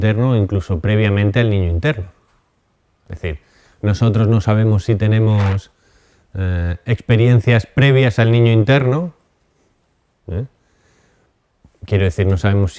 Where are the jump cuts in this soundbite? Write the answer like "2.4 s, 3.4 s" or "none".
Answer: 11.4 s